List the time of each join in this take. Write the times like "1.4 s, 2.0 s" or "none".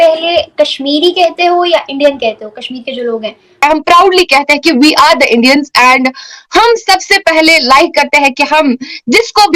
3.6 s